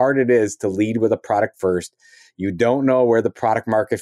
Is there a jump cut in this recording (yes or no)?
no